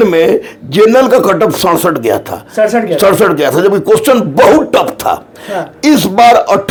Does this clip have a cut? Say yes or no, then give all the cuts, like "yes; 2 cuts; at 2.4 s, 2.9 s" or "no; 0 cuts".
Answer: no; 0 cuts